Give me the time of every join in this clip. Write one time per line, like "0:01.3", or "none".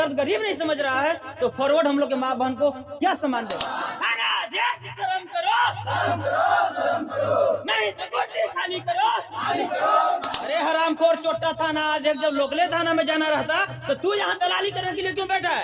0:03.7
0:10.3